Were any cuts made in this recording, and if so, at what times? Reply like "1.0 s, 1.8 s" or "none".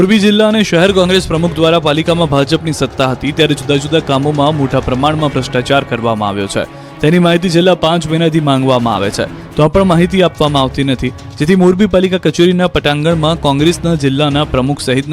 6.4 s